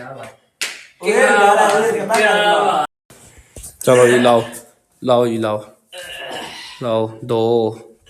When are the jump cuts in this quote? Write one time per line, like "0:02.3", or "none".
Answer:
0:02.8